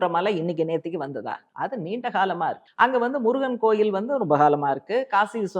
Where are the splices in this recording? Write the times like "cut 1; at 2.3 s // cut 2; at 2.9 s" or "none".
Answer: cut 1; at 1.4 s // cut 2; at 2.6 s